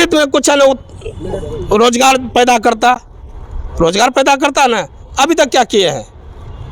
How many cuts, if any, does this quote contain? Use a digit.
0